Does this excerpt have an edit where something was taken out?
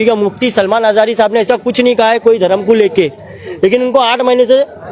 no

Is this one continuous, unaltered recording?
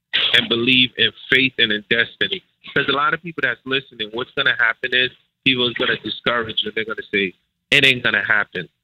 yes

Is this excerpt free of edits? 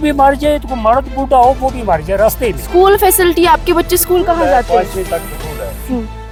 yes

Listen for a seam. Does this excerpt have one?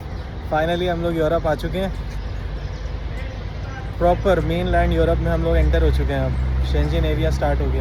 no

